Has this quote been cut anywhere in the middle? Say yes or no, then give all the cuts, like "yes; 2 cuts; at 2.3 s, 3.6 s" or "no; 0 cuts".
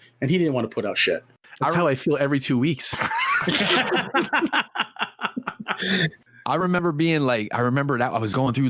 yes; 1 cut; at 1.5 s